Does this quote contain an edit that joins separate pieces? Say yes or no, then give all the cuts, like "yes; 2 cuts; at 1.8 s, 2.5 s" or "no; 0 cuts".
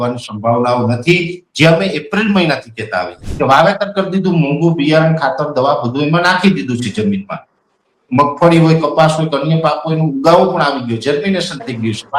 yes; 1 cut; at 3.2 s